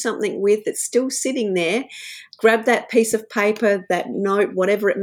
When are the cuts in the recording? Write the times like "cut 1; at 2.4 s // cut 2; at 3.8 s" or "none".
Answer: cut 1; at 2.2 s